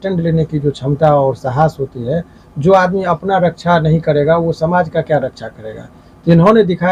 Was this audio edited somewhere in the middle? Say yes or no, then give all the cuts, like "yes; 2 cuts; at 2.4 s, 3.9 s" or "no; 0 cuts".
no; 0 cuts